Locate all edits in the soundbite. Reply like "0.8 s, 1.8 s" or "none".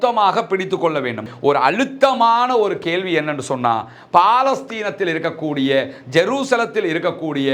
1.2 s